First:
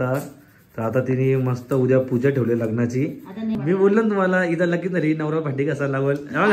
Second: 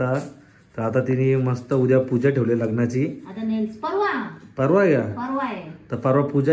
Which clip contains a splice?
first; 1 cut; at 3.5 s

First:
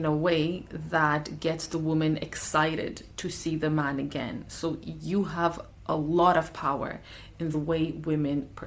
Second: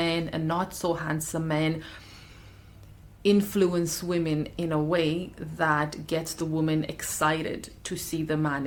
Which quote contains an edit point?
first; 1 cut; at 7.5 s

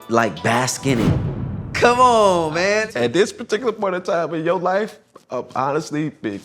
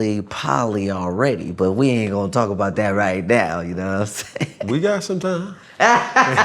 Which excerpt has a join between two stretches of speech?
first; 2 cuts; at 1.2 s, 2.8 s

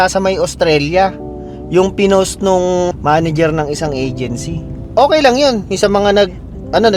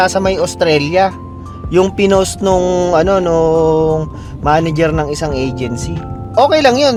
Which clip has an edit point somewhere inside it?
first; 1 cut; at 2.9 s

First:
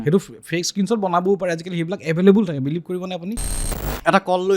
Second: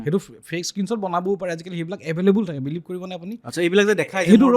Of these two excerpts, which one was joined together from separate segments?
first; 1 cut; at 3.5 s

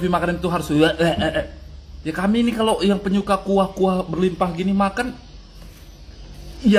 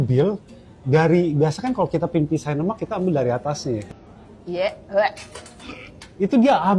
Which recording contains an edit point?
second; 1 cut; at 3.9 s

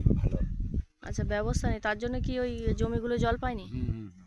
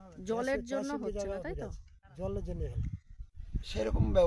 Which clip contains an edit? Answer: second; 1 cut; at 3.2 s

